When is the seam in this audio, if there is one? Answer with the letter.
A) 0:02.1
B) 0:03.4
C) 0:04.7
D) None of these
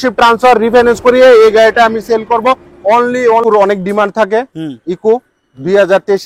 B